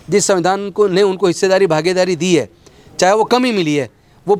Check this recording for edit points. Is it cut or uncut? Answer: uncut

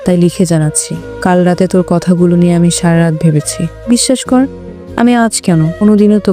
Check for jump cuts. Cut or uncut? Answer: cut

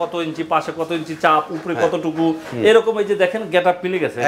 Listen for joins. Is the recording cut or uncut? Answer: uncut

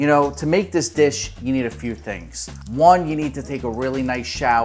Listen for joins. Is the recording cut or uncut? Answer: uncut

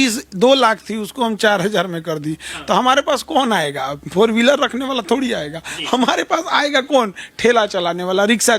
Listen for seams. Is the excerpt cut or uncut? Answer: uncut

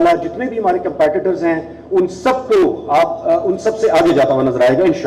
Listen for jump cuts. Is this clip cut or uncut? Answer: uncut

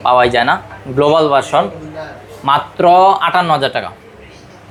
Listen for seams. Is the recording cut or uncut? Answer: uncut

